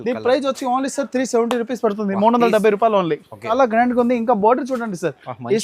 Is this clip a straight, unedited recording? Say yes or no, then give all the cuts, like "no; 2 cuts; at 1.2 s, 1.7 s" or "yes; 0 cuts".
no; 1 cut; at 3.5 s